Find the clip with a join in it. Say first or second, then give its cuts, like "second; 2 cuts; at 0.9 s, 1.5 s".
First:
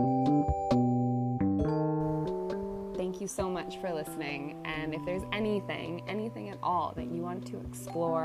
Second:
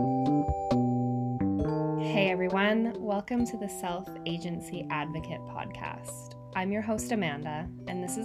first; 1 cut; at 2.1 s